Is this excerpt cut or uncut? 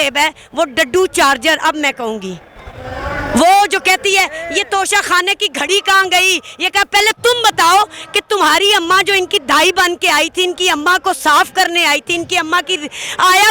uncut